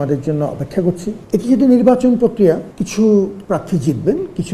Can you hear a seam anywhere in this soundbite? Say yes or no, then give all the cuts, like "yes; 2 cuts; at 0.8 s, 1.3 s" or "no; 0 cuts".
yes; 1 cut; at 1.1 s